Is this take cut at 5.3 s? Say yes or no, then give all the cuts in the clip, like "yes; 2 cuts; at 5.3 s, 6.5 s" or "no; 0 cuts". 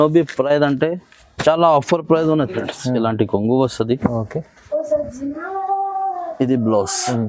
no; 1 cut; at 2.5 s